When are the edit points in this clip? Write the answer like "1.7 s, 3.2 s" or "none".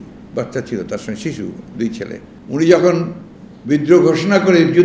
2.3 s

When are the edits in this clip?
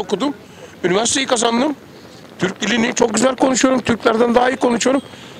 none

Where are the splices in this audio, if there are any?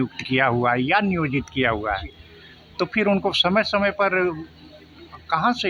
none

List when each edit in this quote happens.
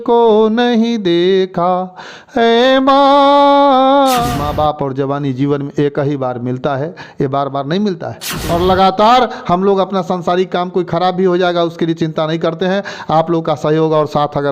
4.3 s, 8.4 s

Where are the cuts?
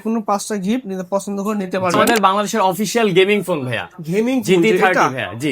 2.1 s

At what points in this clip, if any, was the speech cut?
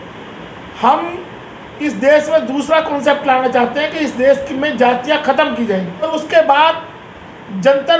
6.1 s

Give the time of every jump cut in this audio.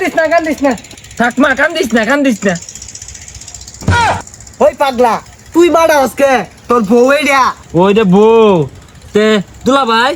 none

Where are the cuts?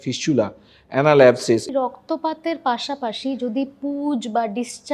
1.7 s

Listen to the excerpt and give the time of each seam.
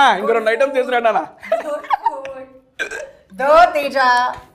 none

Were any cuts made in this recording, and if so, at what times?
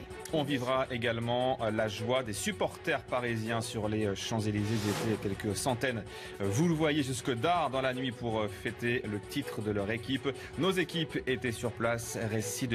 2.0 s

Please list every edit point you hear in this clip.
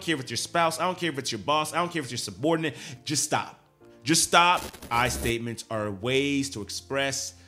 2.9 s, 4.8 s

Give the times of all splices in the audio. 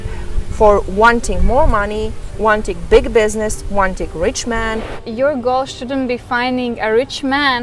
5.0 s

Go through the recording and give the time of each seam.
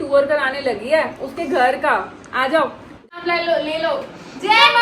3.0 s

